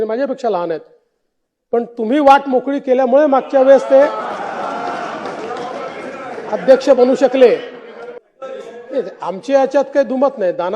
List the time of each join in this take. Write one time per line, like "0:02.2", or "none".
0:08.2